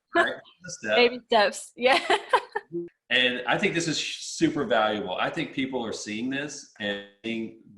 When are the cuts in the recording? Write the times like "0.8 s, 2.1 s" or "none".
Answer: 2.9 s